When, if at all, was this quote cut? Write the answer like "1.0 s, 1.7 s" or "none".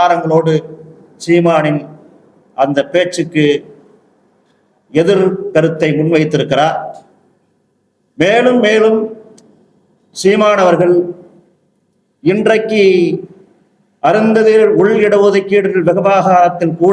none